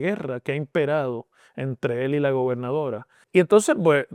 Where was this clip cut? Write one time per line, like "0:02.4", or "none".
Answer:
0:03.2